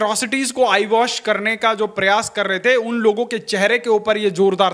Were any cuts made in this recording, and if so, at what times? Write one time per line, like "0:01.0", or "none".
none